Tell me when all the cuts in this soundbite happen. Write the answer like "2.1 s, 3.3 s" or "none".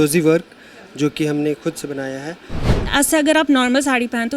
2.7 s

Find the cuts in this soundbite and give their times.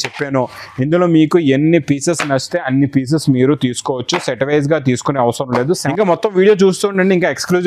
5.9 s

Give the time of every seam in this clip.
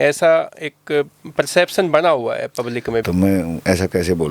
3.0 s

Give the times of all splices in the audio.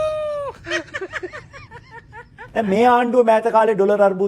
2.4 s

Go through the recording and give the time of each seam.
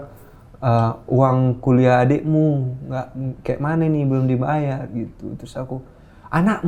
none

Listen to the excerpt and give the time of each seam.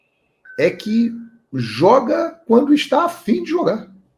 none

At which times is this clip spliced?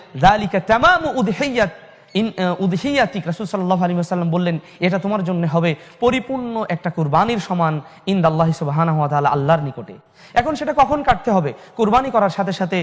none

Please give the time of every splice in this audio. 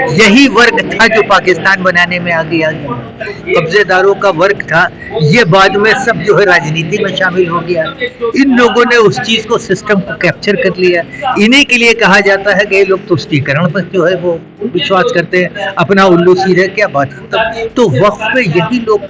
3.4 s

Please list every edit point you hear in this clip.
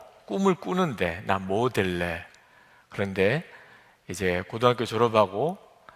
2.6 s

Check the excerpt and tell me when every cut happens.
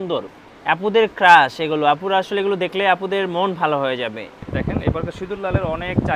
4.5 s

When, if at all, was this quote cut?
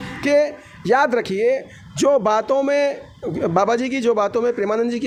none

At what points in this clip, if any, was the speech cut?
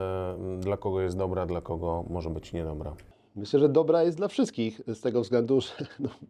none

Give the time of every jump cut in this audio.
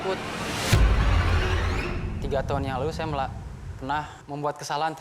2.1 s

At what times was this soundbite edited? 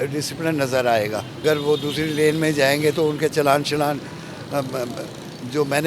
1.4 s

